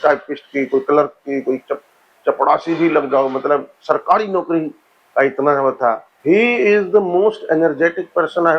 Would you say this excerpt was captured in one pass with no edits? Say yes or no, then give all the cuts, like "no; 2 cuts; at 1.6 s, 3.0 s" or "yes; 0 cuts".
no; 1 cut; at 6.1 s